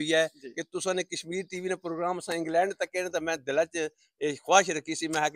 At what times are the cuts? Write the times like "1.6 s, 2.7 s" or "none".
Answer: none

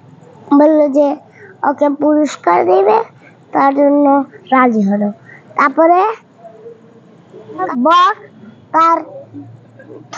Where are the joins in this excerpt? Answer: 7.7 s

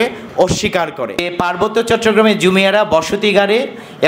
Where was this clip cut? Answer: 1.3 s

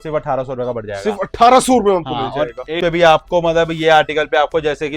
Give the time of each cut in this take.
2.7 s

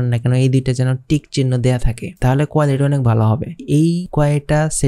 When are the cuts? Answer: 3.9 s

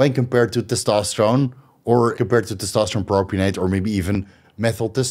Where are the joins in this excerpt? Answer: 2.1 s

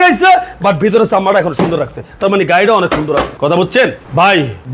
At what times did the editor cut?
none

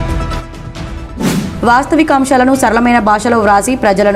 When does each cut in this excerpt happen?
1.3 s

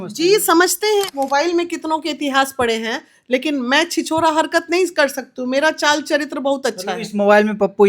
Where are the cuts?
1.1 s

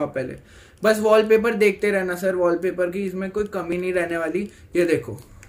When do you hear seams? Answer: none

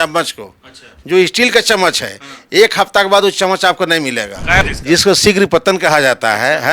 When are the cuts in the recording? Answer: 4.6 s

